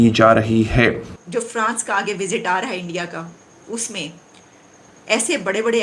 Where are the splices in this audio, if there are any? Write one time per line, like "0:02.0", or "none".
0:01.1